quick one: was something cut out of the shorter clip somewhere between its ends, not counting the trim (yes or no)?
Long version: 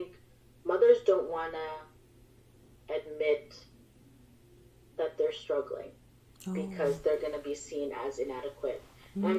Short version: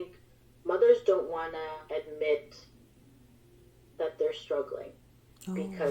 yes